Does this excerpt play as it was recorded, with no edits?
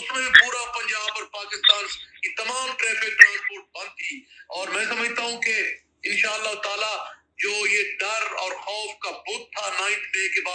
yes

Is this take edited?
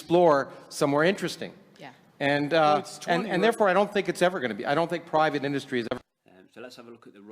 yes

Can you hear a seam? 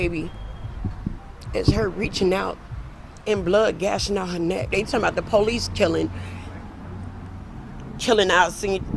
yes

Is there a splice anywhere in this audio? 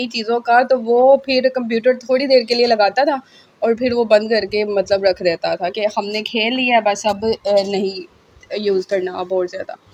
no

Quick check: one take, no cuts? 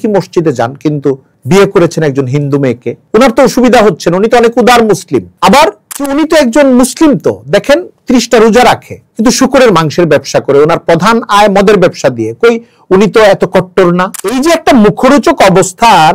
yes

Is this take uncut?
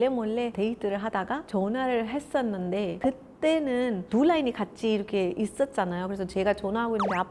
yes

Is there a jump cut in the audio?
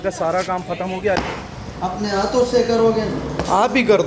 yes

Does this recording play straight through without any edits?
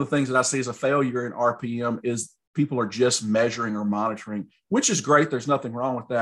yes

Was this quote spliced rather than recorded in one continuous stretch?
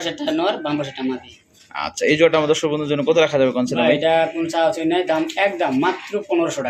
no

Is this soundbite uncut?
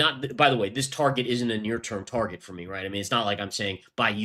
yes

